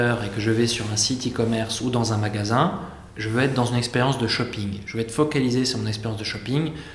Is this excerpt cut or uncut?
uncut